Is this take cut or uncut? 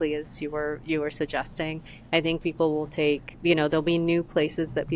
uncut